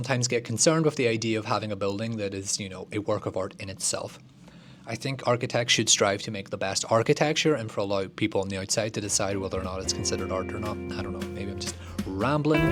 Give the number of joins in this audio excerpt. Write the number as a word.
zero